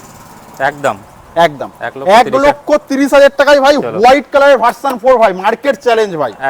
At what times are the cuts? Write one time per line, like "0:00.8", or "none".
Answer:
none

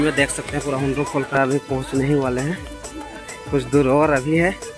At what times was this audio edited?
0:01.3

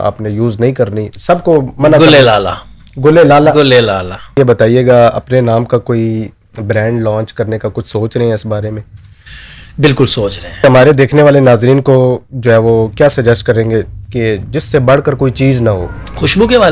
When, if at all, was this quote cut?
0:04.3
0:10.6

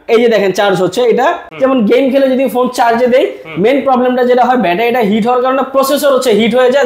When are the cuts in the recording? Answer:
0:01.4

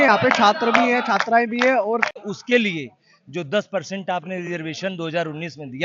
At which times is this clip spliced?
0:02.1

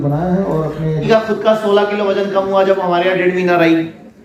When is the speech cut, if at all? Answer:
0:01.0

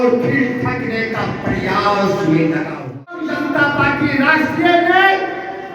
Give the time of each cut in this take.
0:03.2

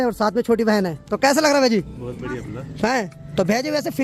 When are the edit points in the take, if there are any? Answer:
none

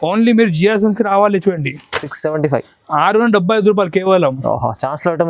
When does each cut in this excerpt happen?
none

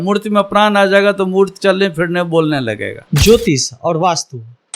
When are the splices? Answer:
0:02.9

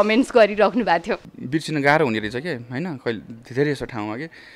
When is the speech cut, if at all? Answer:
0:01.3

